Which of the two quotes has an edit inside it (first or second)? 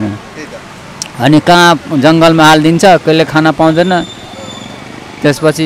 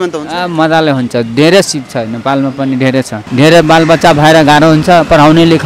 second